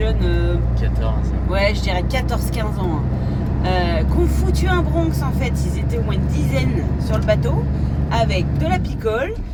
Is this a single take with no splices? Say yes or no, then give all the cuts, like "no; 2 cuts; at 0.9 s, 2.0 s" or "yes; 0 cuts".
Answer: yes; 0 cuts